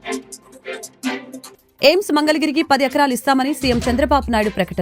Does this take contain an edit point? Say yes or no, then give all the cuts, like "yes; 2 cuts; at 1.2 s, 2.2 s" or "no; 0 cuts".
no; 0 cuts